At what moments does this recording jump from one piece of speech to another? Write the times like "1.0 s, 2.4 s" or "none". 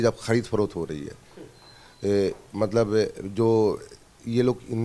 none